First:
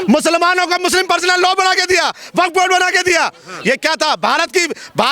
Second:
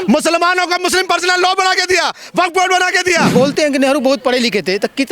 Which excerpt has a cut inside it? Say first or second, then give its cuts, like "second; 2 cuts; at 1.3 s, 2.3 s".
second; 1 cut; at 3.3 s